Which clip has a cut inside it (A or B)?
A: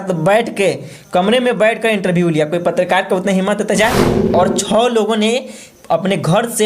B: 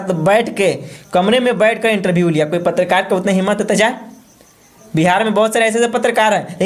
A